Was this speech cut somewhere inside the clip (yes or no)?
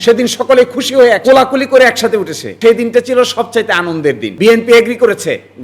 yes